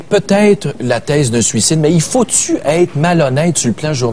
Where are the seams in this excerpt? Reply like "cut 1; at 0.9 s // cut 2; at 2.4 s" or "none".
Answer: cut 1; at 2.3 s